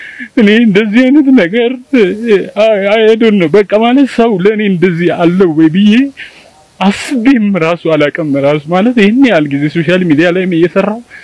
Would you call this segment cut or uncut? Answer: uncut